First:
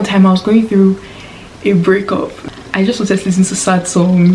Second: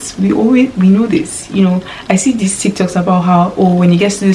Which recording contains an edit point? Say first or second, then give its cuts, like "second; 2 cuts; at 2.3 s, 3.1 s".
first; 1 cut; at 2.4 s